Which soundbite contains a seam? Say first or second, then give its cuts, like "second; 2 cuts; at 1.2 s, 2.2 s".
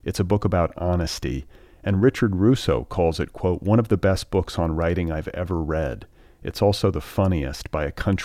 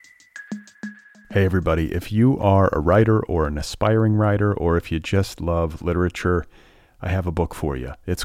second; 1 cut; at 1.0 s